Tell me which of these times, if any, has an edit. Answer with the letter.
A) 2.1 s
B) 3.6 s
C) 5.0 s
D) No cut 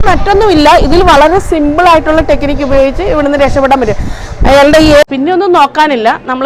C